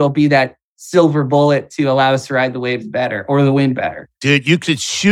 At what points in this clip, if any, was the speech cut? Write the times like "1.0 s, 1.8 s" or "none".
4.0 s